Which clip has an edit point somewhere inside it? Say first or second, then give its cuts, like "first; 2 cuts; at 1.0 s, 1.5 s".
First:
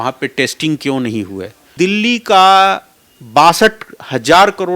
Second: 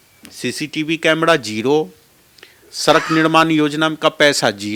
first; 1 cut; at 1.6 s